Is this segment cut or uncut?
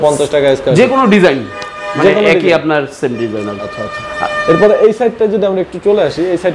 uncut